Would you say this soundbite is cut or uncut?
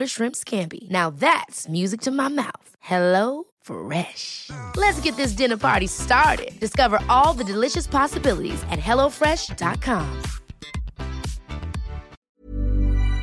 cut